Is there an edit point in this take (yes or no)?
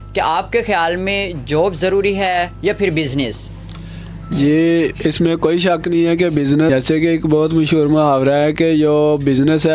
yes